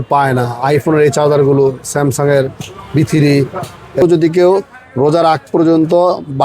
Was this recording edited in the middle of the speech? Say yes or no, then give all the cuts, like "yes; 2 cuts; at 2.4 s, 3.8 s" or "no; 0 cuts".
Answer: yes; 1 cut; at 4.0 s